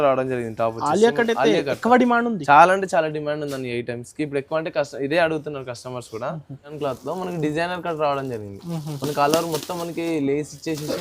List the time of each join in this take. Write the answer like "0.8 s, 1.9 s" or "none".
6.8 s